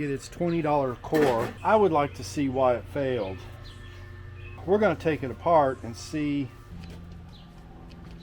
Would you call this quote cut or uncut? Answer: cut